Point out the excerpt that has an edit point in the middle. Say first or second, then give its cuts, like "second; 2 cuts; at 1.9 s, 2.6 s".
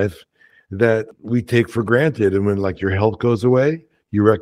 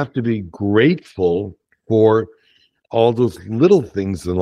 first; 1 cut; at 1.1 s